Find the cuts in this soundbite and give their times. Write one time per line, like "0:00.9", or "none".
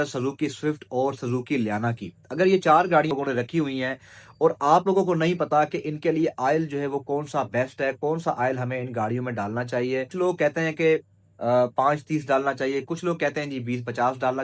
0:03.1
0:10.1